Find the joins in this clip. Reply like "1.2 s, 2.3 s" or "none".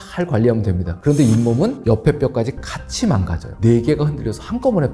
3.5 s